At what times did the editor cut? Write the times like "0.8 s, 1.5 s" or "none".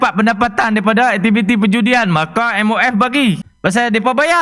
3.5 s

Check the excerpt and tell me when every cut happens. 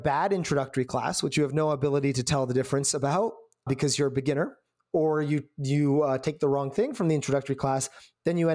3.7 s

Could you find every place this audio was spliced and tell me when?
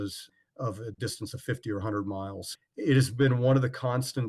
2.4 s

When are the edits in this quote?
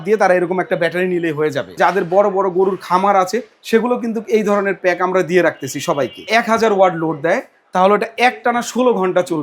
1.8 s, 6.2 s

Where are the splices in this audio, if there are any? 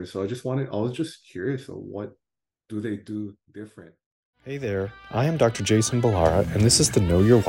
4.5 s

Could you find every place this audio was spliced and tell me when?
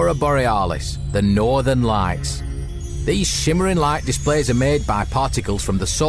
none

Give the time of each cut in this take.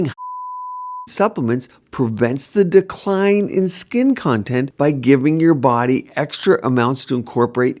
4.7 s

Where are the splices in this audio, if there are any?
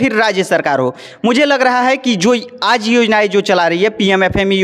none

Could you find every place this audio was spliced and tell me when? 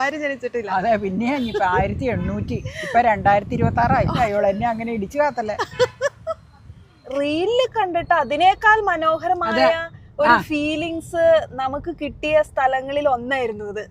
4.1 s, 7.0 s

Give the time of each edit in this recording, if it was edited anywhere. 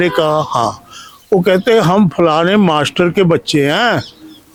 none

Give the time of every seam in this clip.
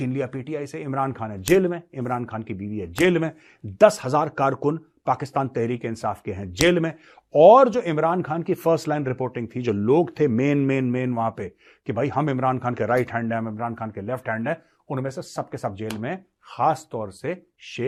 none

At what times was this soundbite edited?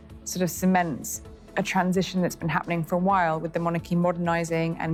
none

